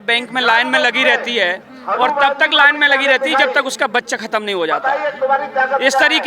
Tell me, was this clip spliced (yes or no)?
no